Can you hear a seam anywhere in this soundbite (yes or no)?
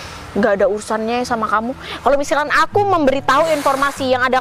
no